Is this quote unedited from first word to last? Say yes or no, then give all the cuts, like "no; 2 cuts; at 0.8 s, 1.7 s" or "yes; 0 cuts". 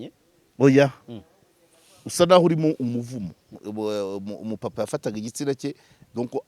no; 1 cut; at 3.6 s